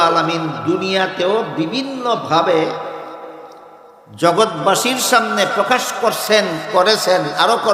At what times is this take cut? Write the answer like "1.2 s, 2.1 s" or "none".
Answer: none